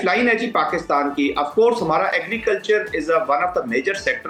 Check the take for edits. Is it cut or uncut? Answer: uncut